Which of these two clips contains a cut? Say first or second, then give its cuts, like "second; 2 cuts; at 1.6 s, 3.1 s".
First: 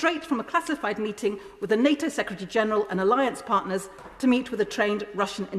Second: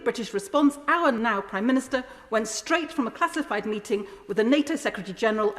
second; 1 cut; at 1.2 s